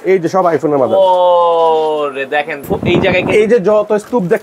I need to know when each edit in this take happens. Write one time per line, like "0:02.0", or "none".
0:02.6